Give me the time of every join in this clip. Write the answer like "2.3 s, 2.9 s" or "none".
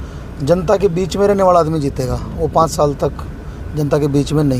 none